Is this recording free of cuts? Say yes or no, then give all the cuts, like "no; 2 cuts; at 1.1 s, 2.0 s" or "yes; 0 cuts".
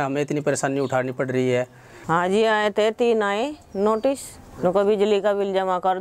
no; 1 cut; at 1.9 s